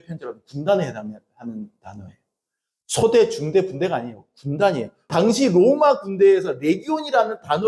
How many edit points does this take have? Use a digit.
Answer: 1